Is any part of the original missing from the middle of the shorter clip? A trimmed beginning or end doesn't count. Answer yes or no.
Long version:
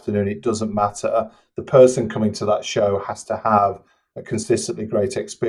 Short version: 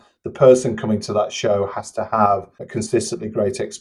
yes